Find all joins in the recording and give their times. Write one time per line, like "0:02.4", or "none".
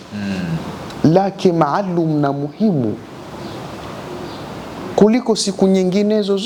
none